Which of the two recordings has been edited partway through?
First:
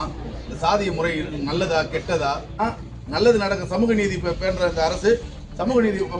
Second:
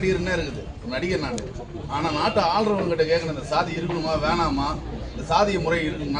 first; 1 cut; at 2.6 s

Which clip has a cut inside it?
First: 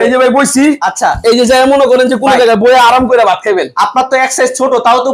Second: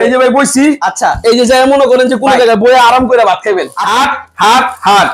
second; 1 cut; at 3.8 s

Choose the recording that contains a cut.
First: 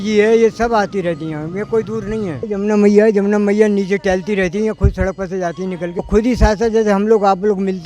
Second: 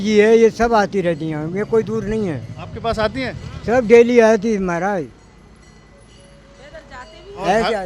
first; 2 cuts; at 2.4 s, 6.1 s

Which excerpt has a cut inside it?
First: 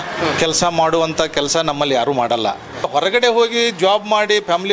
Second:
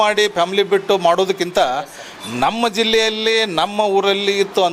first; 1 cut; at 2.9 s

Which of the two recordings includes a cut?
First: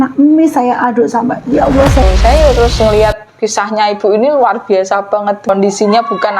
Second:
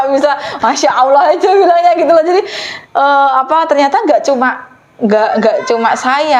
first; 2 cuts; at 2.0 s, 5.5 s

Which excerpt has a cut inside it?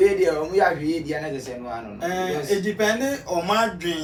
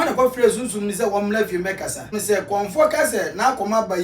second; 1 cut; at 2.2 s

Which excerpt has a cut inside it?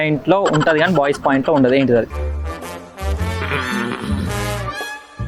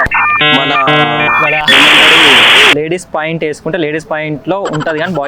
second; 1 cut; at 2.7 s

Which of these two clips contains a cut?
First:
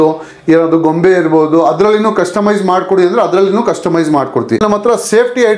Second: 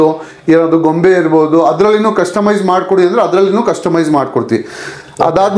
first; 1 cut; at 4.6 s

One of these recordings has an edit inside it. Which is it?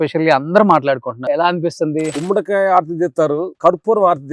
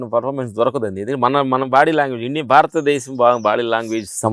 first; 3 cuts; at 1.2 s, 2.2 s, 3.5 s

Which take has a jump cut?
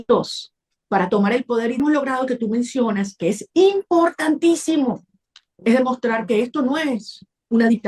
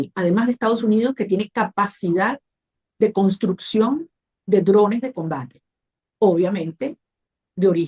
first; 1 cut; at 1.8 s

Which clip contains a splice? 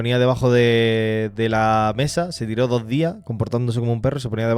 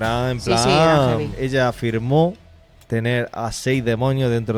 second; 1 cut; at 1.4 s

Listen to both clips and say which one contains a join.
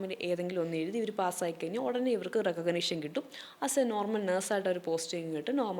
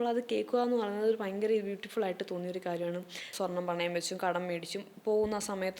second; 1 cut; at 3.3 s

